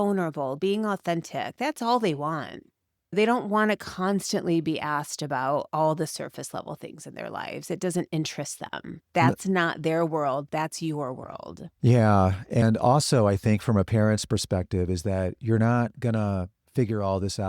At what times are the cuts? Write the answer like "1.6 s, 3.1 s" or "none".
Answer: 12.6 s